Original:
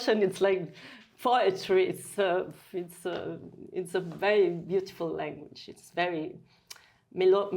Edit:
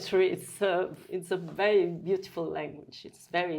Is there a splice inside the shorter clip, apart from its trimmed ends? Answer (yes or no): yes